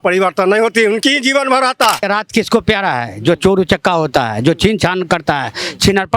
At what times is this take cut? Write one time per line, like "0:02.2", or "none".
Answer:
0:02.0